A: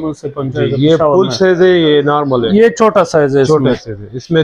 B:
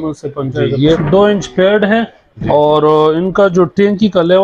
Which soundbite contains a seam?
B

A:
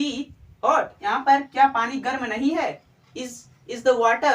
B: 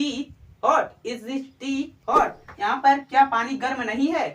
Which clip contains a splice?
A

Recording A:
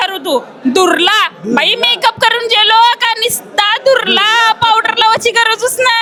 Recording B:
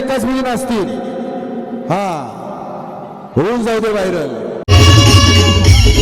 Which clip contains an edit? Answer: B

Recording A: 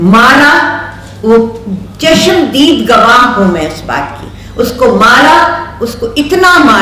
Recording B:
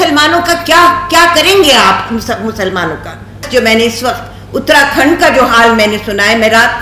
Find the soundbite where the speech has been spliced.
B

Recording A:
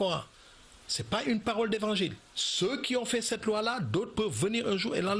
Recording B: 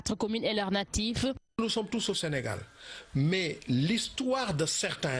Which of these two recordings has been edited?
B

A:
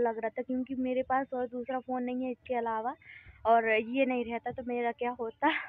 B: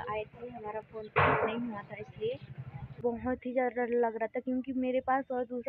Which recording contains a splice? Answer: B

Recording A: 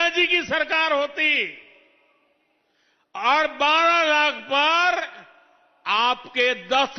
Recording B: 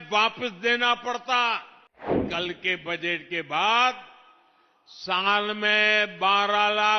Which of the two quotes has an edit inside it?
B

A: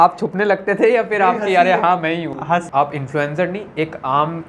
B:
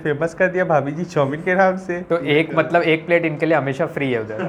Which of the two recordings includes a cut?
A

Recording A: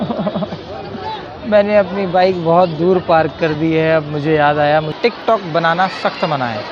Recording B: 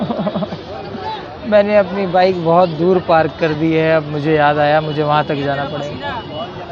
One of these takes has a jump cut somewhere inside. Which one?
A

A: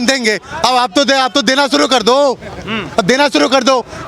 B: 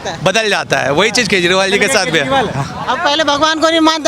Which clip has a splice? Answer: B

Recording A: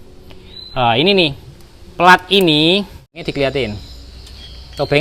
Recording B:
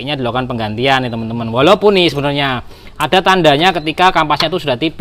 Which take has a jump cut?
A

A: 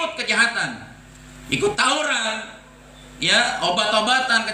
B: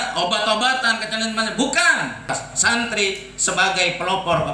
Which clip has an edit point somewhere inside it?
B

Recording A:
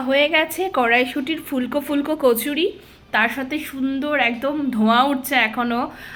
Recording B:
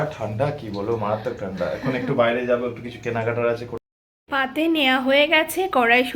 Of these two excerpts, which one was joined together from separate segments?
B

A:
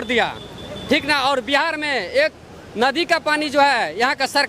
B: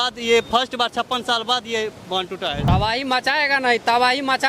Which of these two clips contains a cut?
B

